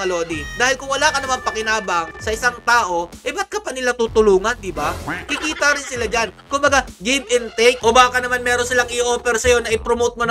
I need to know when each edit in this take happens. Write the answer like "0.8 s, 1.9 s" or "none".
7.8 s

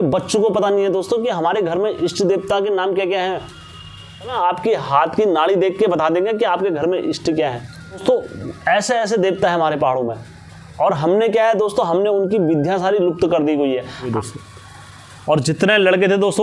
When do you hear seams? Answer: 4.3 s, 8.0 s, 14.1 s

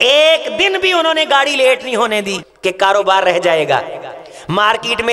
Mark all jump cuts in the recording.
2.4 s

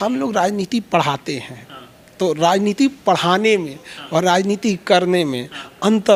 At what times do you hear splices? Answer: none

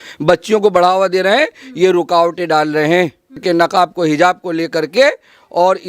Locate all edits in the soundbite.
3.4 s

